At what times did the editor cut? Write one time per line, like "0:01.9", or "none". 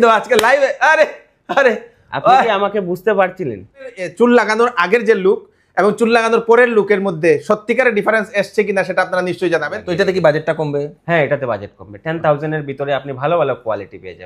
0:04.0
0:09.7